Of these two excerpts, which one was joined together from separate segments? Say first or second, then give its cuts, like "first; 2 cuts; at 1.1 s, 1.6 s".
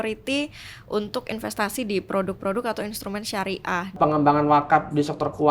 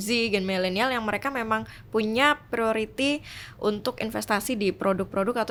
first; 1 cut; at 3.9 s